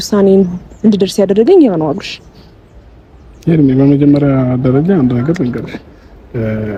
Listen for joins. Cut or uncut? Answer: uncut